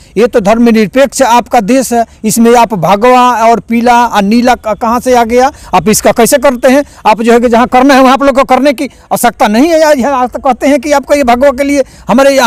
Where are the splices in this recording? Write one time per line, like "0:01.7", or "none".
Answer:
none